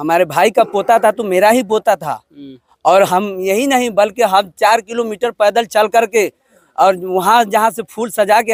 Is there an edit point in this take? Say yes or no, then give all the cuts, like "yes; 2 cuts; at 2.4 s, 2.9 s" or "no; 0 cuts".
no; 0 cuts